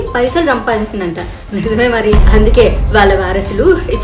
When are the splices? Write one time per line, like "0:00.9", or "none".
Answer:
0:02.2